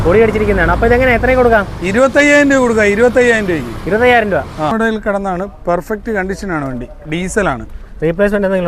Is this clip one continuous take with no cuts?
no; 1 cut; at 4.7 s

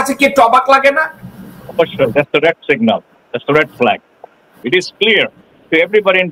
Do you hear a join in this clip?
yes; 1 cut; at 4.5 s

